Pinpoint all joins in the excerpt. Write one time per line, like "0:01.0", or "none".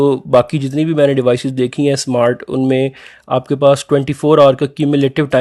none